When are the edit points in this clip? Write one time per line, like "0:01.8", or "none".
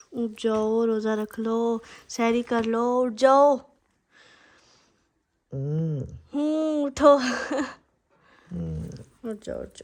none